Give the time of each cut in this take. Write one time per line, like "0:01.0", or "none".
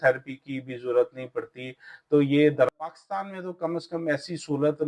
0:02.9